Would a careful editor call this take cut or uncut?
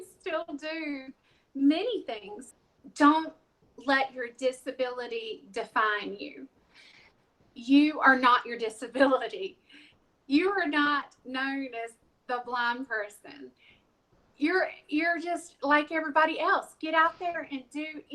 cut